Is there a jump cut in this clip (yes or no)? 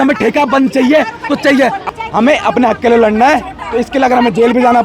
yes